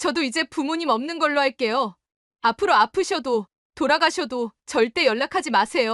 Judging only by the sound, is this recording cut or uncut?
uncut